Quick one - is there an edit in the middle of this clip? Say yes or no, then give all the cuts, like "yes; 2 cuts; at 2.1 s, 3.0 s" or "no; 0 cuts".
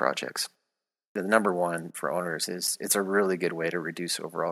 yes; 1 cut; at 1.1 s